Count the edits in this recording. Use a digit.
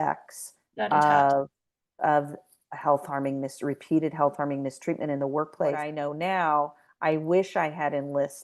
1